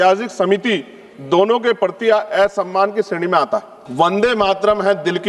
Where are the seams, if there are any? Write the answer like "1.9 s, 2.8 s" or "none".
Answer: 3.8 s